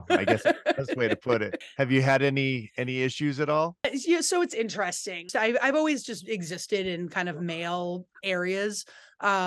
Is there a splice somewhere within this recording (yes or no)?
yes